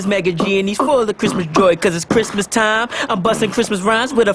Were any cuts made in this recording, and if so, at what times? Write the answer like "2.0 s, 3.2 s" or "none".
2.8 s